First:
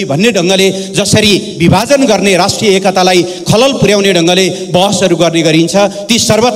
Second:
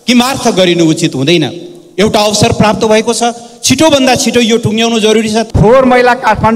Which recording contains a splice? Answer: second; 1 cut; at 5.5 s

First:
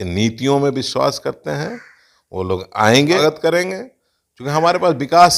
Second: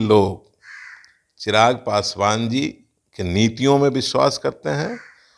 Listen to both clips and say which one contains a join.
first; 1 cut; at 3.2 s

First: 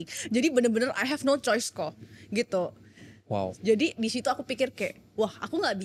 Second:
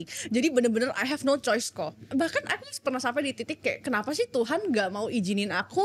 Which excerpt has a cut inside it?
second; 1 cut; at 2.0 s

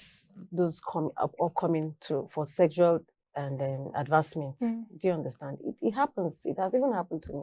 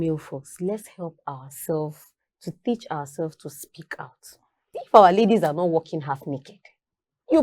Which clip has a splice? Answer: second; 1 cut; at 4.7 s

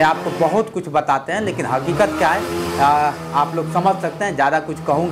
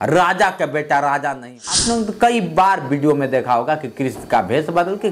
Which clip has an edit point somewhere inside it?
second; 1 cut; at 1.9 s

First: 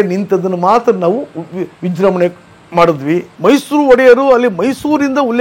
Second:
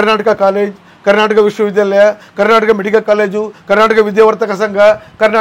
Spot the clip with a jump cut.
first; 1 cut; at 3.3 s

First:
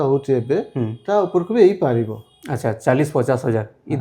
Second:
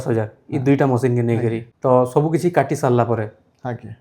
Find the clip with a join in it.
second; 1 cut; at 1.7 s

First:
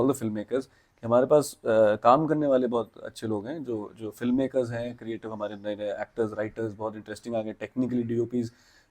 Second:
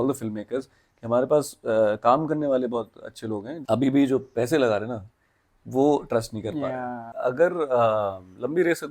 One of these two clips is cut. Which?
second; 2 cuts; at 3.5 s, 7.0 s

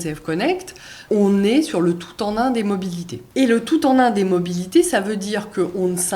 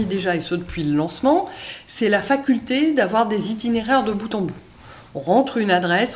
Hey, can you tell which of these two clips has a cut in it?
first; 2 cuts; at 1.0 s, 3.1 s

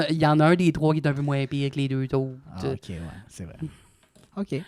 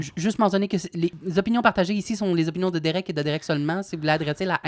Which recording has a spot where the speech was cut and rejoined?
second; 1 cut; at 1.1 s

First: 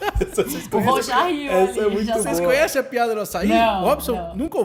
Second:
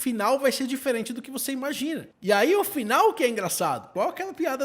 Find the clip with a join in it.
second; 2 cuts; at 2.1 s, 3.9 s

